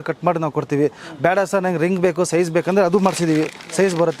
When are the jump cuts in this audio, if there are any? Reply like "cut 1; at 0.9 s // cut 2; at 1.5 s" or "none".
none